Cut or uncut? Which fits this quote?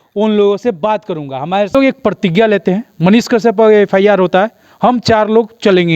cut